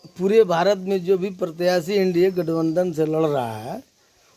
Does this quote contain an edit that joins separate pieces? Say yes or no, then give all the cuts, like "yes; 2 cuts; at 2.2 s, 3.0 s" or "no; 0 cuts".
no; 0 cuts